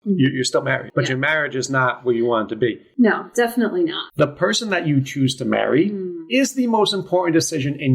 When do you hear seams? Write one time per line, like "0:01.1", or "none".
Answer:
0:00.8
0:02.8
0:04.0